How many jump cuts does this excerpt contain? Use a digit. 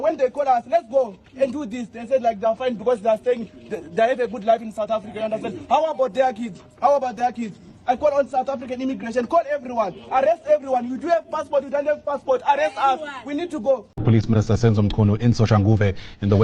1